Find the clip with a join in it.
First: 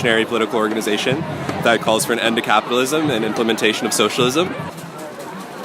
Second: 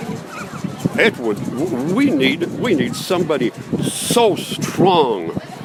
first; 1 cut; at 4.7 s

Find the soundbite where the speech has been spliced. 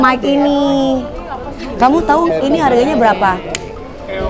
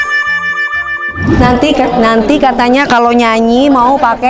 second; 1 cut; at 1.1 s

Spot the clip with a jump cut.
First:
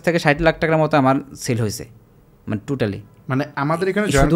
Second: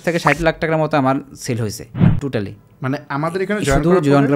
second; 1 cut; at 1.8 s

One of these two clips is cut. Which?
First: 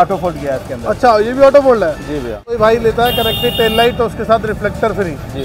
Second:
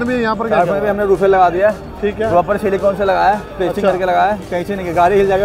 first; 1 cut; at 2.6 s

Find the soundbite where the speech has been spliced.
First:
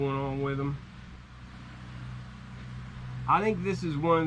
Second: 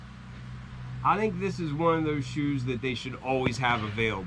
first; 1 cut; at 1.3 s

